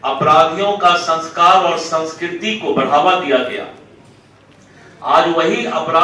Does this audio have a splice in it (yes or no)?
no